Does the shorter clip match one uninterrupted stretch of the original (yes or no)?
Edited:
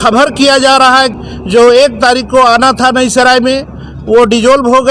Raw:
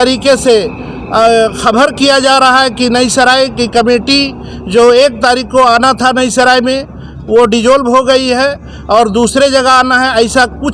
no